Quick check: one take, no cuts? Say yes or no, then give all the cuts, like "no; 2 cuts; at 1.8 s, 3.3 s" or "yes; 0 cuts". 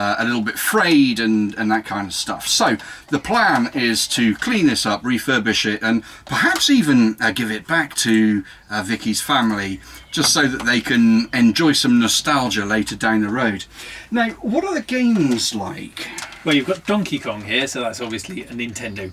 yes; 0 cuts